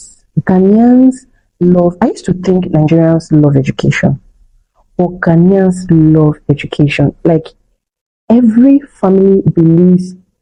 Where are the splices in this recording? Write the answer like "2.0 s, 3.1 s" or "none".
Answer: none

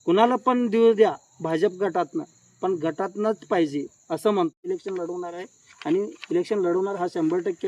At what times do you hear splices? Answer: 4.7 s

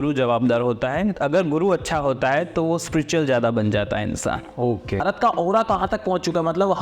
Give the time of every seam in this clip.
5.0 s

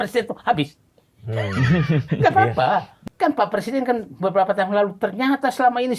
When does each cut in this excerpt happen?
3.0 s

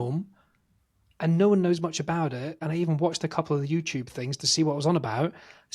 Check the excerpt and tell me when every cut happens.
2.6 s

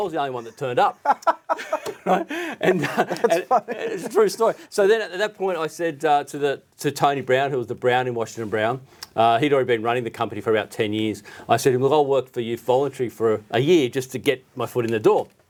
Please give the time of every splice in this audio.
none

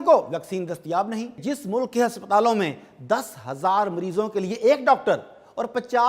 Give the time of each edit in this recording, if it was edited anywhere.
1.4 s

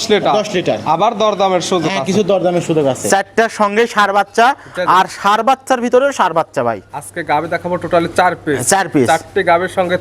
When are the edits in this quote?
3.0 s

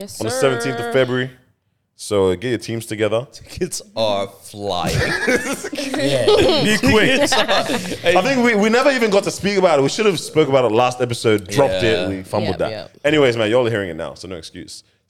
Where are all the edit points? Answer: none

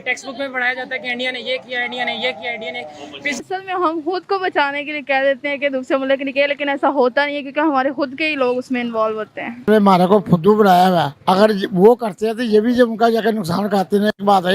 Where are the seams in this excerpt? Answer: 3.4 s, 9.7 s

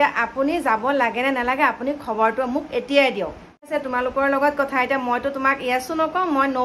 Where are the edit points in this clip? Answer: 3.7 s

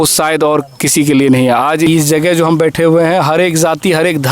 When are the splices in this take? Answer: 1.9 s

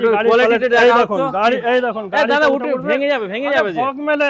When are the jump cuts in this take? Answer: none

